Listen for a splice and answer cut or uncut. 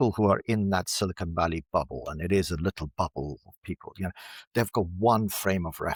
uncut